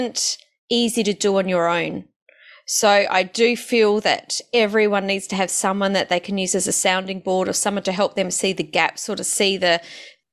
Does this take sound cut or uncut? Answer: uncut